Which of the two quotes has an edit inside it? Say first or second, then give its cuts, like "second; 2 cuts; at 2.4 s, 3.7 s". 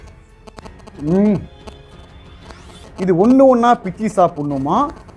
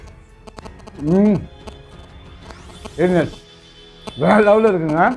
first; 1 cut; at 2.8 s